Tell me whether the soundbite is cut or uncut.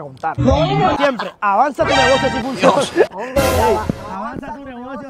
cut